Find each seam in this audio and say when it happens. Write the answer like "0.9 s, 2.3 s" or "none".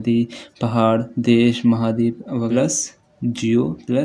2.5 s